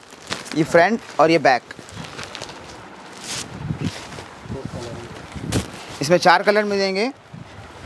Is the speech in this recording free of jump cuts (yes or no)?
yes